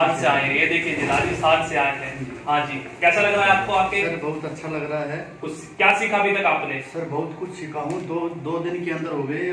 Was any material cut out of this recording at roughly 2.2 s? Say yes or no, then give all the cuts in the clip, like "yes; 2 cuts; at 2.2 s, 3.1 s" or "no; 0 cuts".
no; 0 cuts